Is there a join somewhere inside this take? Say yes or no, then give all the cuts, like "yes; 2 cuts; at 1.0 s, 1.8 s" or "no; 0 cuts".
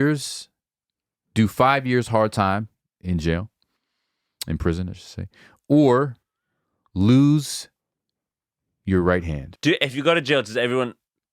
yes; 1 cut; at 9.4 s